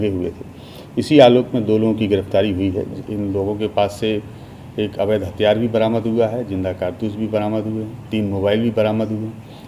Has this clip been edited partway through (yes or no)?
yes